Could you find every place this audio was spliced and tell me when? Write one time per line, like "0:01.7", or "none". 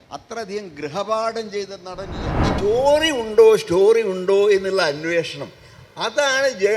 0:02.4